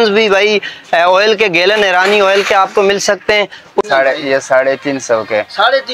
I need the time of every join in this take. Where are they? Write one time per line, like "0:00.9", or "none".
0:03.8